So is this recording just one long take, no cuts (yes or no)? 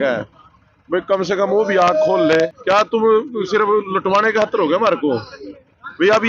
no